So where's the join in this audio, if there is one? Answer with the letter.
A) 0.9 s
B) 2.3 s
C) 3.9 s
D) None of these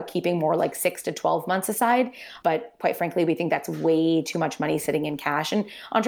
B